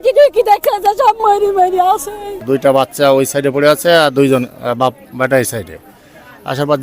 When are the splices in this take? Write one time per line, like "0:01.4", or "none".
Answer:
none